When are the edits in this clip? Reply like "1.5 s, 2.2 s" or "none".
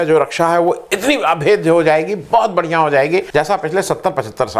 3.3 s

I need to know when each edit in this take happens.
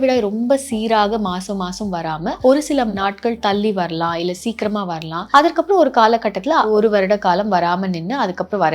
2.4 s, 3.0 s, 5.2 s, 6.7 s

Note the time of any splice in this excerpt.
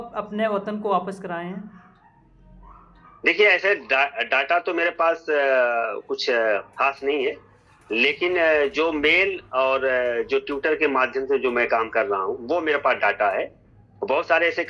none

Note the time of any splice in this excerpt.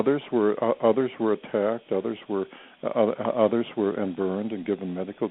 2.7 s

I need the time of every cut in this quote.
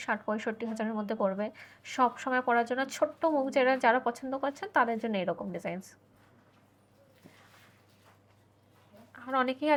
none

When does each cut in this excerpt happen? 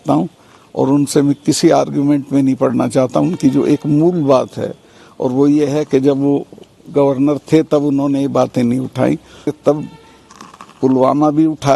9.5 s

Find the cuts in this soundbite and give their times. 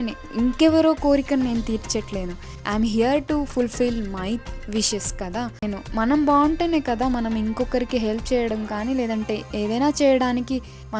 5.6 s

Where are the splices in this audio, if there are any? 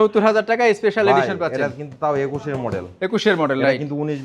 none

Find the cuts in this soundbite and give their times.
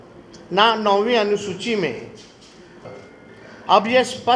2.7 s

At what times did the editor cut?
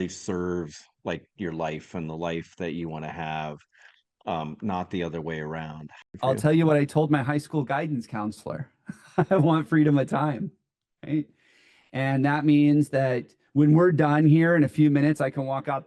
6.1 s

